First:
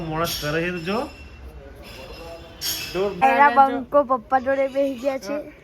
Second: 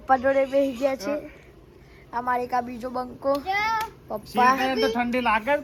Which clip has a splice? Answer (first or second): first